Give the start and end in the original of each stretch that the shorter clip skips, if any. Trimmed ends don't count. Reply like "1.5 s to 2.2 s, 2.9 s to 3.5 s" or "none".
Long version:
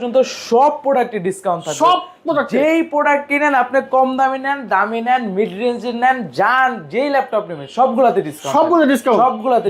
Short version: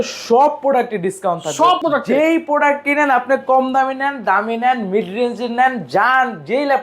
2.0 s to 2.2 s